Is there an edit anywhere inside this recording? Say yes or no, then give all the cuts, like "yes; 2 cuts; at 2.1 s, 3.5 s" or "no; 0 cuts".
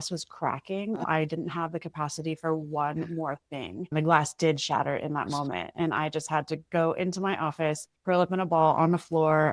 yes; 2 cuts; at 1.0 s, 3.9 s